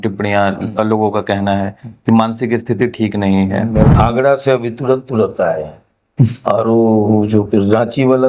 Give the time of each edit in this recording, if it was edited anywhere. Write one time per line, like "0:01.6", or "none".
0:03.9